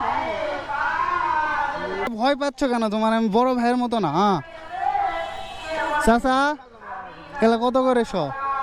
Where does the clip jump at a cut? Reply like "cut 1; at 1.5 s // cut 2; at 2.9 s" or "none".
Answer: cut 1; at 2.1 s